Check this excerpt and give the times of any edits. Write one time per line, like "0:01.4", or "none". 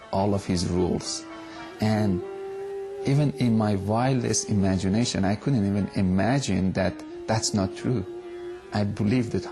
0:06.7